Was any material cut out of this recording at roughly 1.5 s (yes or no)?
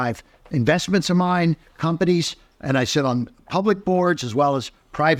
no